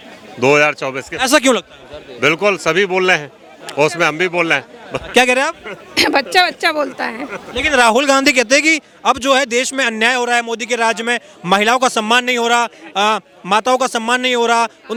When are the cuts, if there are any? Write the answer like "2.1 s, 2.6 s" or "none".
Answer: none